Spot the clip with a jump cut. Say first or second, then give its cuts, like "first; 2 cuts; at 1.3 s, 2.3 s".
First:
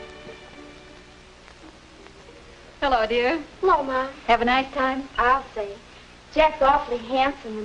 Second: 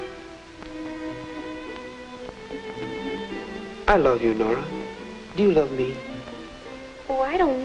first; 1 cut; at 2.9 s